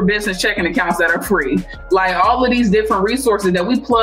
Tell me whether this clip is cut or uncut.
uncut